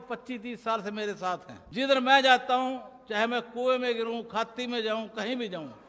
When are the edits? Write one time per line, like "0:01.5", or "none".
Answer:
0:01.6